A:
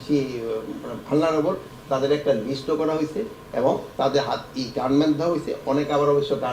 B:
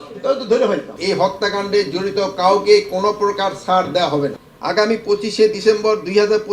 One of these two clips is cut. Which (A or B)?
B